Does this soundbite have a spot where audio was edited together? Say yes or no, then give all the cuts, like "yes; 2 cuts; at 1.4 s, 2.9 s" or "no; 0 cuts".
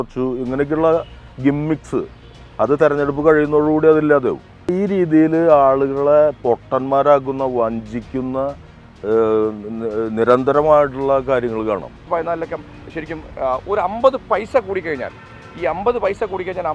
yes; 2 cuts; at 4.7 s, 12.0 s